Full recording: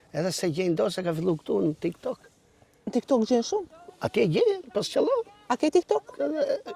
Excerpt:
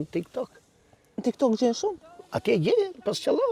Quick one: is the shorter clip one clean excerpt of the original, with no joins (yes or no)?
yes